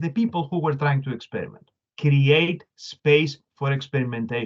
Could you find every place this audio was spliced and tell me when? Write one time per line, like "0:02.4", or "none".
0:01.8